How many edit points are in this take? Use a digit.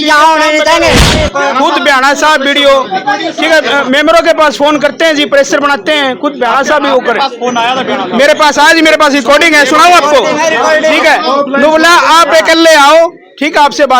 1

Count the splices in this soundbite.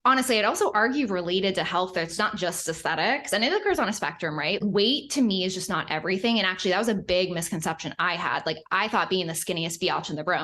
1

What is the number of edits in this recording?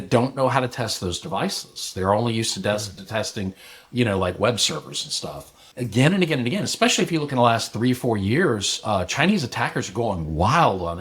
1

